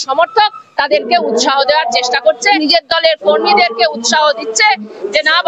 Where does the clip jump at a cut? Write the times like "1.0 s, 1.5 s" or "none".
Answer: 2.6 s